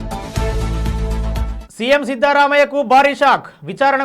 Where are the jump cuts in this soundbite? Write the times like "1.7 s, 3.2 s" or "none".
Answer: 1.5 s